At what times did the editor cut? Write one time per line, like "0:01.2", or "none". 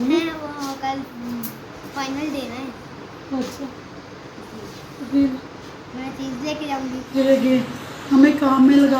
0:01.1
0:07.1